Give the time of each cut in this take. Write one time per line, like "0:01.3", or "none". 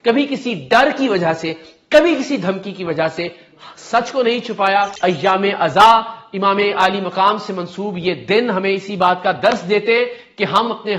0:04.9